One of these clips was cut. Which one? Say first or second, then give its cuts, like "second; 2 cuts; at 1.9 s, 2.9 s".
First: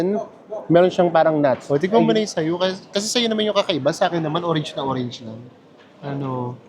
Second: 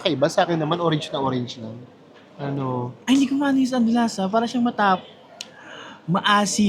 first; 1 cut; at 1.6 s